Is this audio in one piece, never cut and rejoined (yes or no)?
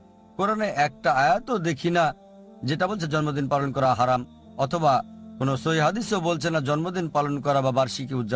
yes